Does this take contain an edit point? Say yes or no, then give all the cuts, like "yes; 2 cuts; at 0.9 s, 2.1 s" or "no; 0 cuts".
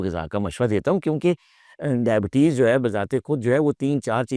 no; 0 cuts